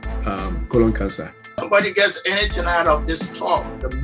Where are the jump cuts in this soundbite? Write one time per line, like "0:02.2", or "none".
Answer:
0:01.5